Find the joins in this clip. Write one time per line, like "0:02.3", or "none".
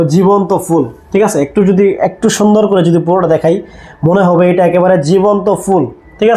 none